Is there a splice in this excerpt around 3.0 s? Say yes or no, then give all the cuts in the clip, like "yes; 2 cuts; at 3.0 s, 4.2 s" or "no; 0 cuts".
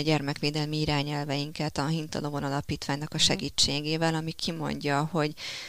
no; 0 cuts